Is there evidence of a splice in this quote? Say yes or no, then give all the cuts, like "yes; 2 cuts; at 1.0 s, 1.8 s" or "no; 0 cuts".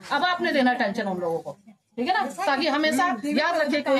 no; 0 cuts